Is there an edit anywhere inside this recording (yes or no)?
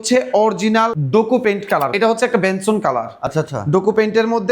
yes